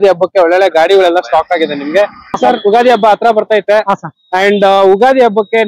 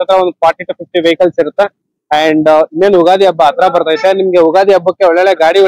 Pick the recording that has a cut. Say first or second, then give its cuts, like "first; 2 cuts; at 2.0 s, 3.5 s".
first; 1 cut; at 2.4 s